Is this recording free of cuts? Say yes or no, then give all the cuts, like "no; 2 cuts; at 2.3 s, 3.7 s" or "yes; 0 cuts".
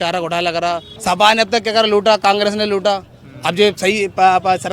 no; 1 cut; at 0.9 s